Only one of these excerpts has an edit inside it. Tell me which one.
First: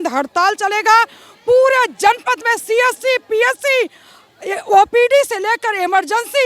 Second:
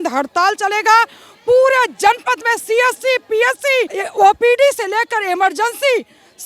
second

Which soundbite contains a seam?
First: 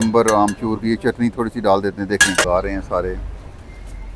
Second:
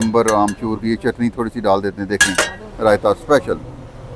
first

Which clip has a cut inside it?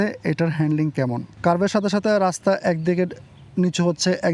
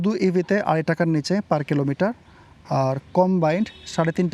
first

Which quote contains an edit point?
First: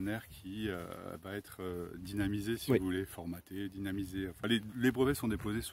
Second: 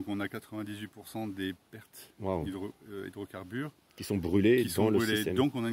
first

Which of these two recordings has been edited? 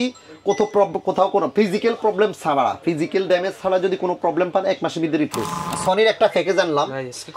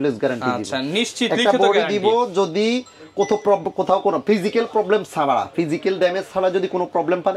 first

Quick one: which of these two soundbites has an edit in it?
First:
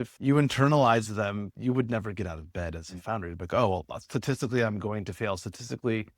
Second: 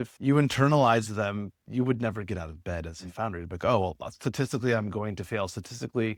first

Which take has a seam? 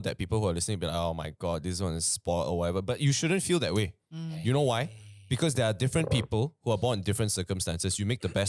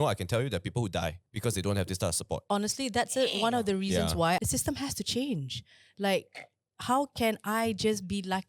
second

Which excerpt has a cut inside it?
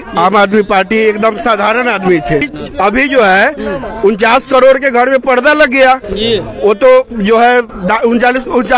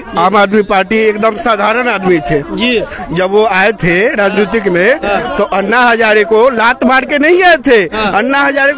first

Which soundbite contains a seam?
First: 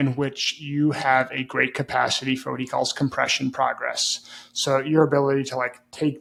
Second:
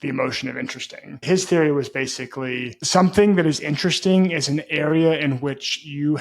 second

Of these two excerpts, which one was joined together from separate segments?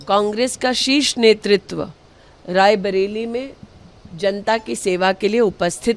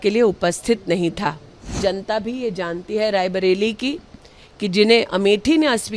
second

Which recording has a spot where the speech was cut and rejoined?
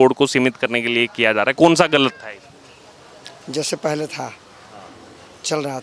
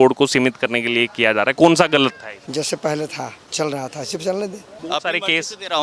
second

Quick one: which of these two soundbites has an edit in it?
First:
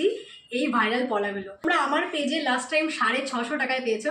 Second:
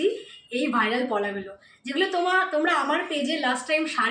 first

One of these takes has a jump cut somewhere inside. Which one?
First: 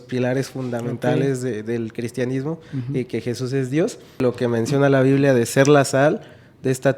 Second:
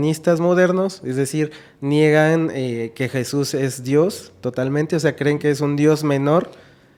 first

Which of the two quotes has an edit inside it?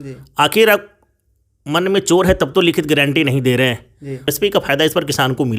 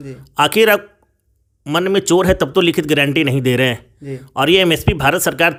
first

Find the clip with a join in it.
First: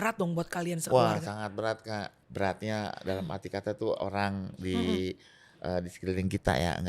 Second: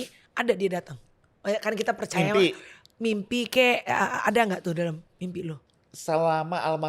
first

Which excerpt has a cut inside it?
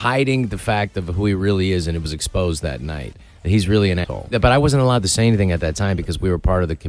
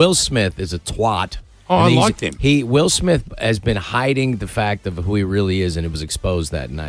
first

